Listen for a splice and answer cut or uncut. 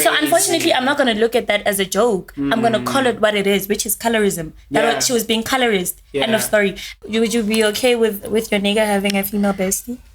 cut